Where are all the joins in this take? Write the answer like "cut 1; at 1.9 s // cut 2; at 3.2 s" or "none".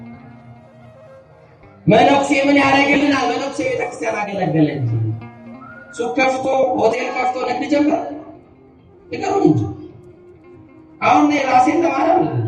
none